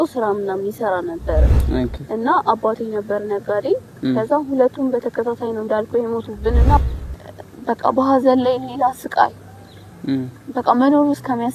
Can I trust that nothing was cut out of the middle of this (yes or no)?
no